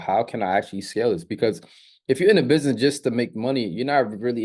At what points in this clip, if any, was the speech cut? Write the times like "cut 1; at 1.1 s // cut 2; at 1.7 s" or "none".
none